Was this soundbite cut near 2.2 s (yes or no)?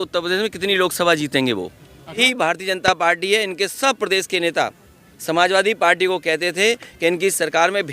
yes